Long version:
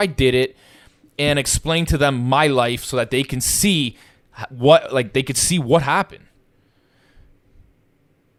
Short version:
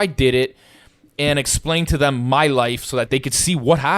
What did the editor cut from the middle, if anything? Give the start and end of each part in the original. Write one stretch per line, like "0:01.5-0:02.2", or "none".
0:03.1-0:05.1